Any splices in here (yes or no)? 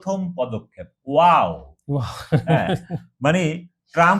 no